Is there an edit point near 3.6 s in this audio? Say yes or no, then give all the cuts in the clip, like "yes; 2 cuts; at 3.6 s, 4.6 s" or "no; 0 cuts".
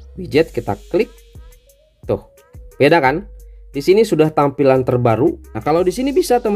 no; 1 cut; at 5.5 s